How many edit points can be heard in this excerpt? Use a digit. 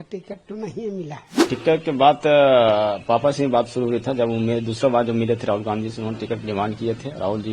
1